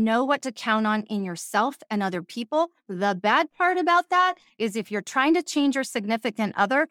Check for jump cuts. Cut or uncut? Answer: uncut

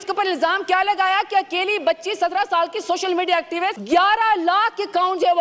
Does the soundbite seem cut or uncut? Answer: cut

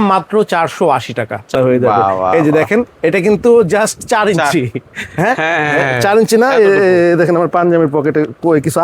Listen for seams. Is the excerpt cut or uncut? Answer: cut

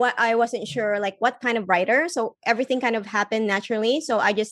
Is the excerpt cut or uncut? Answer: uncut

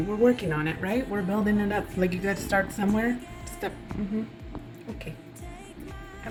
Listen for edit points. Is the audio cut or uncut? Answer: uncut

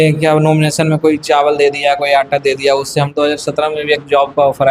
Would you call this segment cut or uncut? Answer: cut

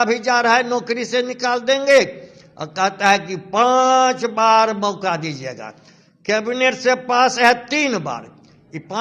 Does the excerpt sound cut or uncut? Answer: uncut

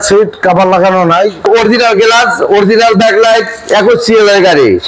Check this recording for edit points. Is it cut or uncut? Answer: cut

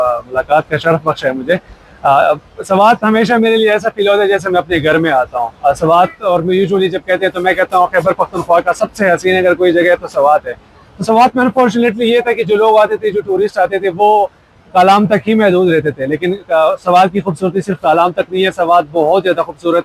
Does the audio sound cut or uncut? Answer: uncut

